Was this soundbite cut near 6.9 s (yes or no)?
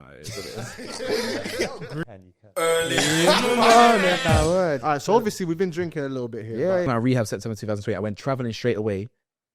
yes